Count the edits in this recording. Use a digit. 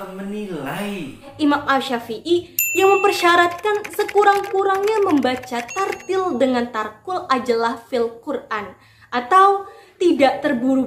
1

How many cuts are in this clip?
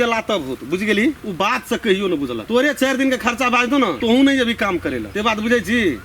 4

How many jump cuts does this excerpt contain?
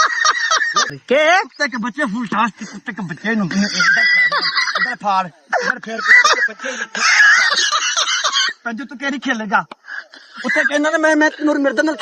1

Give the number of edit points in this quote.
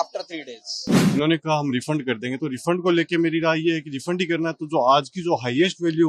1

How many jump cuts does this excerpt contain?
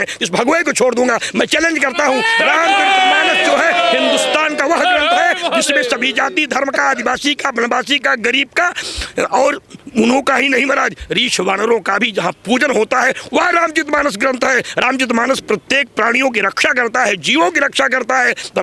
0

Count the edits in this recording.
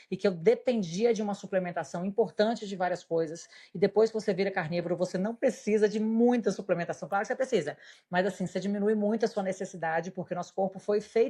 0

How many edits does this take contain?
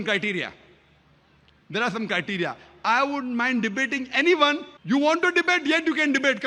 1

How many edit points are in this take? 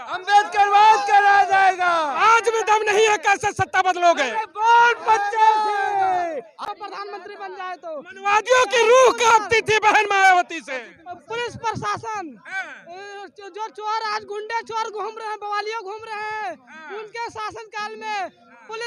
1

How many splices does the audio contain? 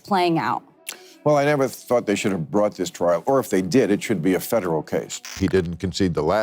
1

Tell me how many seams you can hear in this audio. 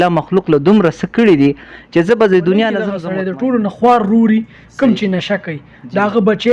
1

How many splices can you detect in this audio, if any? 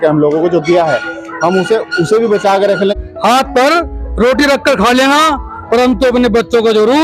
1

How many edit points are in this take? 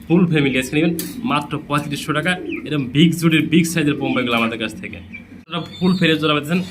1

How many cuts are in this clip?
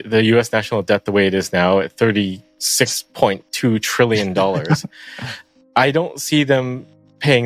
0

